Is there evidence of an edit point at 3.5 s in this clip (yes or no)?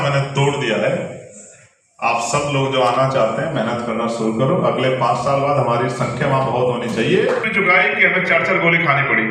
no